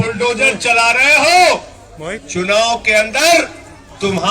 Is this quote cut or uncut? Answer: uncut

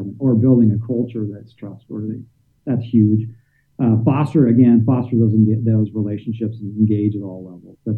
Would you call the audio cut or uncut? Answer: uncut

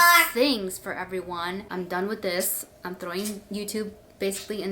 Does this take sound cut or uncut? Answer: cut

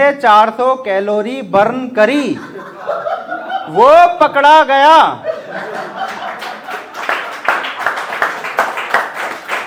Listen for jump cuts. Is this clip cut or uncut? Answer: uncut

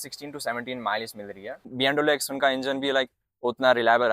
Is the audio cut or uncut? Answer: cut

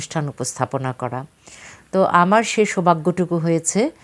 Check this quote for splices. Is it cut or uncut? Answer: uncut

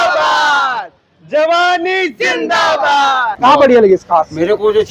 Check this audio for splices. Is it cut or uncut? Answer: uncut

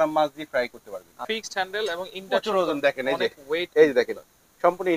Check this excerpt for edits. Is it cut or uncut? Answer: cut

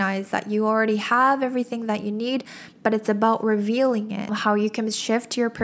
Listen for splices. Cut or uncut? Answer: cut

